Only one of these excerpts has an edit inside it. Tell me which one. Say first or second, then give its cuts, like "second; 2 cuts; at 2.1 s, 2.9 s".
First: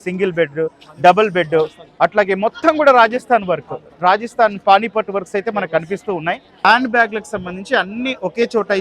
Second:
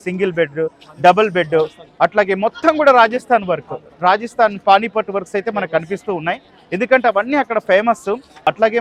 first; 1 cut; at 6.6 s